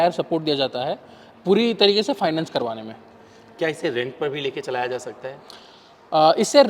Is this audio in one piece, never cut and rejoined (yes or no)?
yes